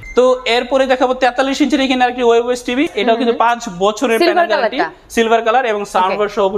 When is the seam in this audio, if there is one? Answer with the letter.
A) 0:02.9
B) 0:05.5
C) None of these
A